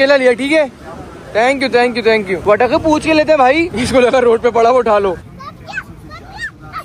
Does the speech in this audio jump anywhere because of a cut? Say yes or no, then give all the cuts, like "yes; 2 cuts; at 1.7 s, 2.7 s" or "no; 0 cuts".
no; 0 cuts